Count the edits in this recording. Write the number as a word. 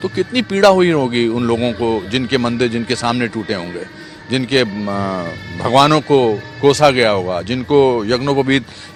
zero